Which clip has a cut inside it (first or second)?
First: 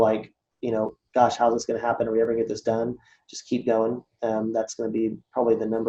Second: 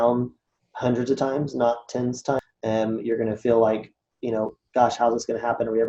second